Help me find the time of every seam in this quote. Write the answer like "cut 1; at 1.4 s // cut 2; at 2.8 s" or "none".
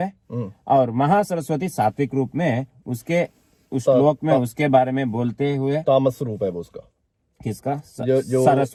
none